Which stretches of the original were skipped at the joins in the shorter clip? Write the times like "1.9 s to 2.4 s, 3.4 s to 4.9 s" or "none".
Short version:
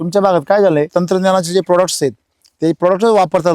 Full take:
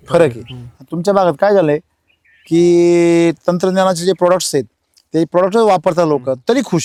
1.8 s to 3.4 s